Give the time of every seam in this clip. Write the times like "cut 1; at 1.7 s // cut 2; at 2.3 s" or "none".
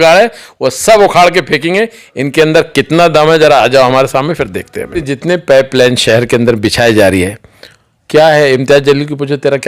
cut 1; at 5.0 s